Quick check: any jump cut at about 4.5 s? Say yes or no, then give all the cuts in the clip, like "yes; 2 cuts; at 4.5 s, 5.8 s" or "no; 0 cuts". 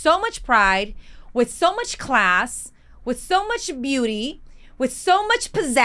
no; 0 cuts